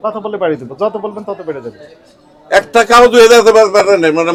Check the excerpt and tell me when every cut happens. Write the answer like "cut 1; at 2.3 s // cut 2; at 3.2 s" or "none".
none